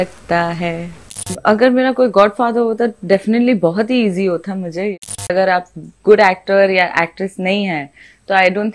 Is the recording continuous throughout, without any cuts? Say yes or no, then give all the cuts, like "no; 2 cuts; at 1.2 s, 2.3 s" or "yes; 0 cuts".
no; 2 cuts; at 1.3 s, 5.1 s